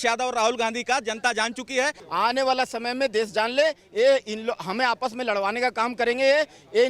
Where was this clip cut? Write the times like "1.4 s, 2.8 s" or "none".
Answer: 2.0 s